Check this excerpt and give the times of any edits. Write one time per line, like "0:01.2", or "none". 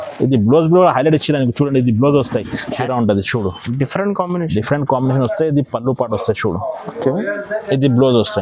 0:02.8